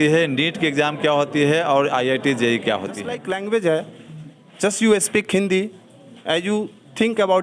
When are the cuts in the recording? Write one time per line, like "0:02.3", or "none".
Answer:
0:03.2